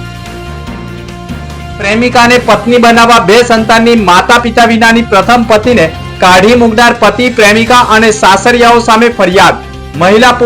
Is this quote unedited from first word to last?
yes; 0 cuts

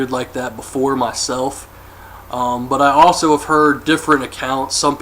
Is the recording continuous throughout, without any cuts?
no; 1 cut; at 1.3 s

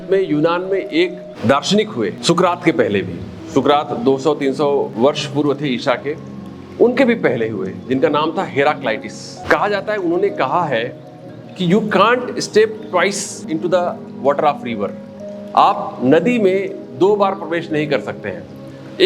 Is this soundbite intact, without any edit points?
no; 5 cuts; at 1.3 s, 2.2 s, 4.9 s, 9.4 s, 13.4 s

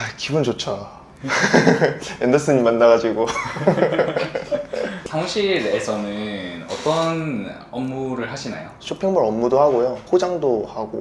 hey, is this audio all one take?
no; 1 cut; at 5.0 s

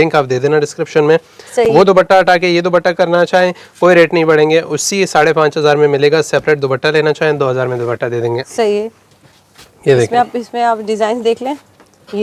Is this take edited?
no; 0 cuts

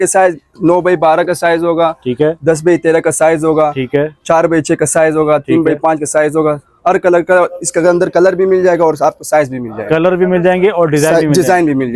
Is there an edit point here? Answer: no; 0 cuts

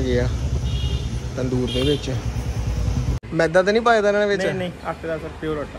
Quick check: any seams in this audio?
yes; 1 cut; at 3.2 s

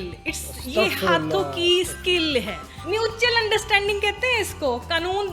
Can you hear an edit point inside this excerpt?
yes; 1 cut; at 2.8 s

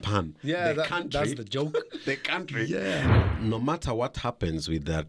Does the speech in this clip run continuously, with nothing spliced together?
no; 1 cut; at 3.2 s

